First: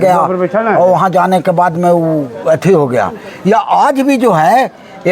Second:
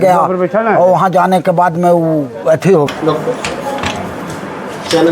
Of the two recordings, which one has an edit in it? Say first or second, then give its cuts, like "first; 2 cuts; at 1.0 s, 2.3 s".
second; 1 cut; at 2.9 s